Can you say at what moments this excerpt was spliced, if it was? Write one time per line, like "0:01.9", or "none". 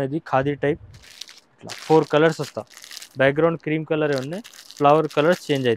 none